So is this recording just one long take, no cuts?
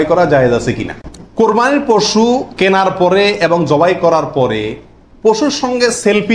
no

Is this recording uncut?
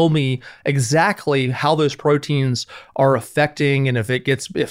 yes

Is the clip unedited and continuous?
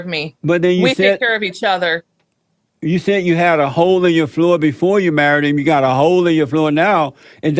yes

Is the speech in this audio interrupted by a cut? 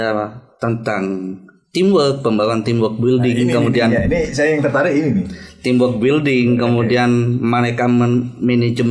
no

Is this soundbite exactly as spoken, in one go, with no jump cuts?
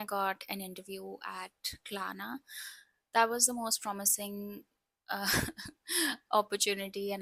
yes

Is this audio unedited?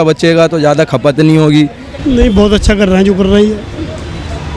no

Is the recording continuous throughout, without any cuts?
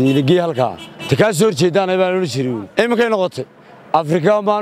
no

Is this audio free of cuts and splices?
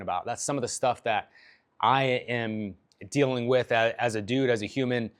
yes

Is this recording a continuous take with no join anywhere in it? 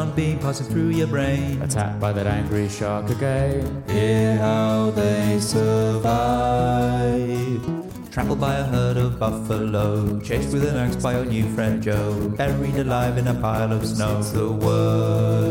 yes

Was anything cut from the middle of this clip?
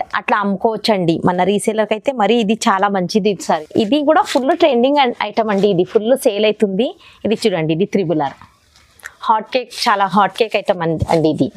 yes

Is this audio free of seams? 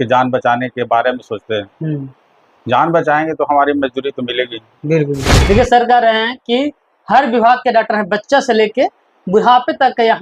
no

